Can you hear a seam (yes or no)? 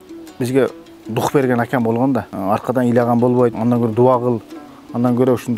yes